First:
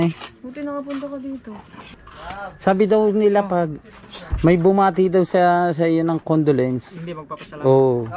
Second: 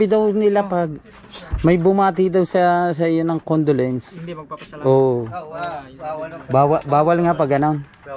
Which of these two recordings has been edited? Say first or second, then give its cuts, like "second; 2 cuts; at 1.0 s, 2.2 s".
first; 1 cut; at 1.8 s